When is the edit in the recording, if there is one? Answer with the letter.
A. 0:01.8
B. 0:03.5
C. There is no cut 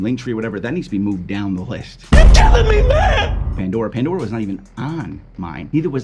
B